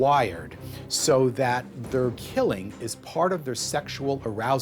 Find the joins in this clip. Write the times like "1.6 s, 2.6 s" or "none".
2.2 s